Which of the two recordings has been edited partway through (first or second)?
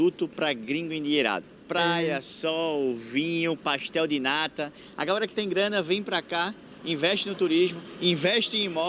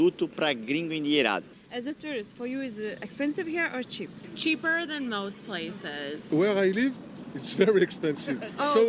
second